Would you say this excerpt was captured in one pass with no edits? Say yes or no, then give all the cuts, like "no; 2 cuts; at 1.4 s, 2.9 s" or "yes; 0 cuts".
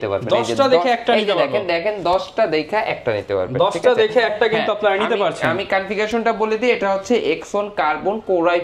yes; 0 cuts